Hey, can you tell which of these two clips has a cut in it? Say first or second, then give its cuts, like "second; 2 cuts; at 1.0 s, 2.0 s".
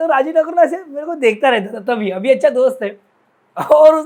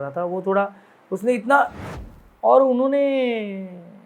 second; 1 cut; at 1.8 s